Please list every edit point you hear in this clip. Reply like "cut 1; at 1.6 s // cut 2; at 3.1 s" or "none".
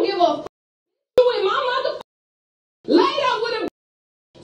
none